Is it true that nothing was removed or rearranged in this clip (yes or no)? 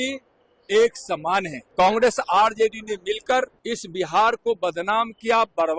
no